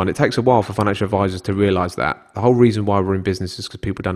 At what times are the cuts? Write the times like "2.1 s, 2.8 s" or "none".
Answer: none